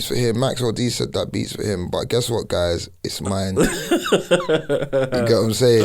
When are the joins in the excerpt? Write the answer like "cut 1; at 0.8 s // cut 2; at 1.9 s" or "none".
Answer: none

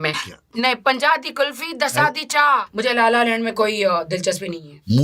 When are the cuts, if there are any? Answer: cut 1; at 2.7 s

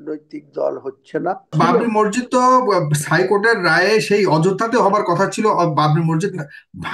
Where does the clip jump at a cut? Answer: cut 1; at 1.5 s

